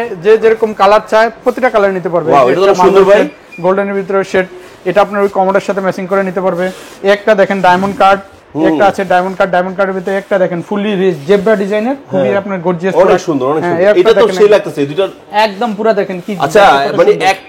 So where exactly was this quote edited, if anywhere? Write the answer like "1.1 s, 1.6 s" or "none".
none